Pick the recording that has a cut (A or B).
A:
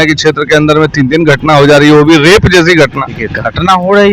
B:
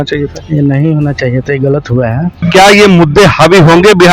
B